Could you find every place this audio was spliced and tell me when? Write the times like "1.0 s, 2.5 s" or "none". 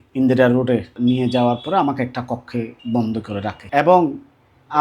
0.9 s, 2.8 s, 3.7 s

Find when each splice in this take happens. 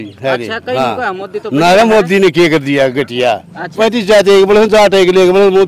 3.7 s

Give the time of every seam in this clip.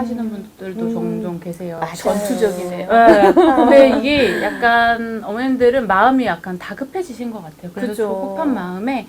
none

